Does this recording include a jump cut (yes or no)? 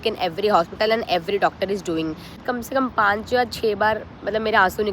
yes